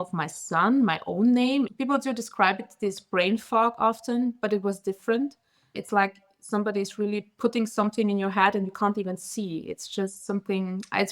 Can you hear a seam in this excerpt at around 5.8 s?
yes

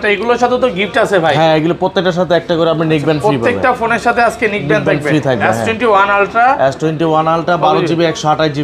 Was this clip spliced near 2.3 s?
no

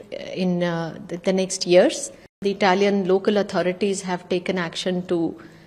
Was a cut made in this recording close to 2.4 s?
yes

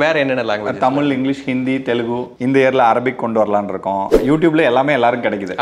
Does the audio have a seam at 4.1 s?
yes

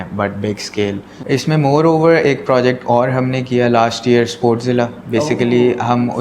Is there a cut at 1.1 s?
yes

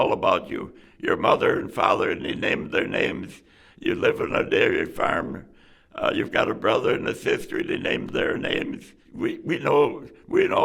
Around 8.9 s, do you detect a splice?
no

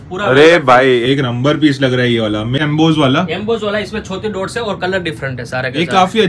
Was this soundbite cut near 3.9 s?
no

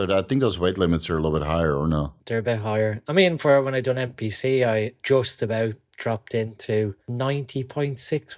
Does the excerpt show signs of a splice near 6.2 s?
no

